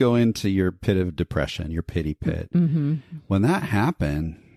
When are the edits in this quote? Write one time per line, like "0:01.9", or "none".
none